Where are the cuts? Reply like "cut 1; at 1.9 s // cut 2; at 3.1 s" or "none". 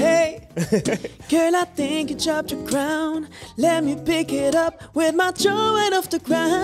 none